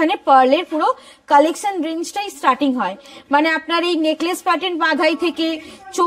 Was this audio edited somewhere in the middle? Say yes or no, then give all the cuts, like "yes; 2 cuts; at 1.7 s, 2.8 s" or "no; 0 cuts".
no; 0 cuts